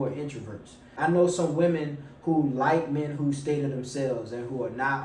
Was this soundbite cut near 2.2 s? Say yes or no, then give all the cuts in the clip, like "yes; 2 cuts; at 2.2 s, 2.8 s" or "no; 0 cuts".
no; 1 cut; at 0.9 s